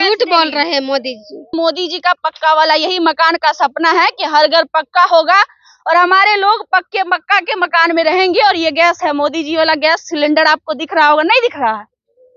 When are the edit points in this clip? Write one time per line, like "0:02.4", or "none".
0:01.5